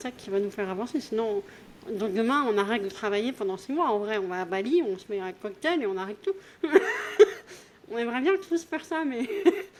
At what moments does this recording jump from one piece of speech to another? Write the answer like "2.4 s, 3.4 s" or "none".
none